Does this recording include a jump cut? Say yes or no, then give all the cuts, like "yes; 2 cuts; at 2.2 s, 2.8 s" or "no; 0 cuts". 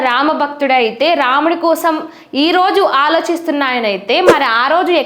no; 0 cuts